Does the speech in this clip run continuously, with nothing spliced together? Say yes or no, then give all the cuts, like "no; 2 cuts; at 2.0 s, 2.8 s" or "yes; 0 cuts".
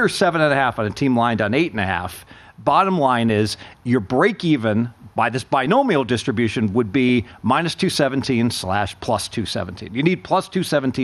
yes; 0 cuts